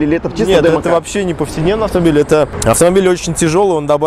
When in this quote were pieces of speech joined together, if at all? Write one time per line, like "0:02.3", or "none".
0:02.6